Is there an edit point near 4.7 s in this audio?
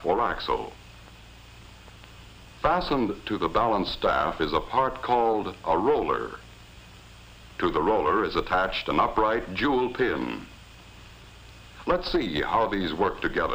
yes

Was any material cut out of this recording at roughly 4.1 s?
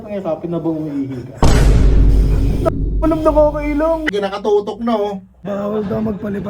yes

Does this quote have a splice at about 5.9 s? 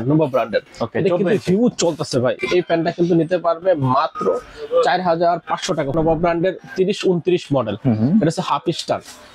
yes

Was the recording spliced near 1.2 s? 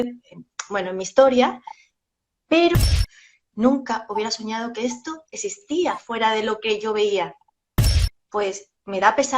no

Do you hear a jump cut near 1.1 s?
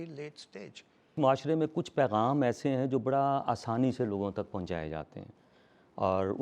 yes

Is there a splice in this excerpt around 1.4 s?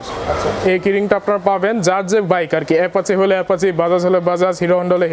no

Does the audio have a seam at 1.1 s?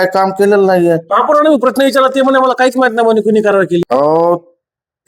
yes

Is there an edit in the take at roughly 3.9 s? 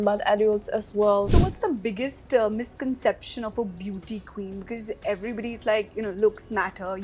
no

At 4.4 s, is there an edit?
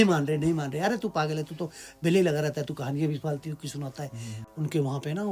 yes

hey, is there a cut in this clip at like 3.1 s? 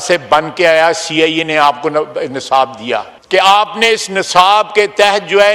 yes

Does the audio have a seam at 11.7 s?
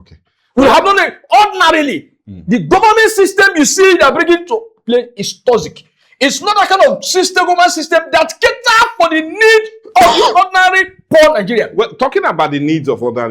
no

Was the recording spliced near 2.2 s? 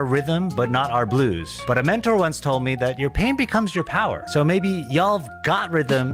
no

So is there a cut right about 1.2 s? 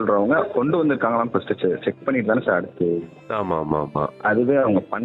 no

